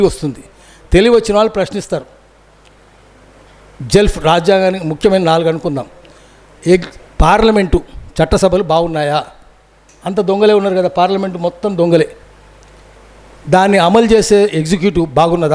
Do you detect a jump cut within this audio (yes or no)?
no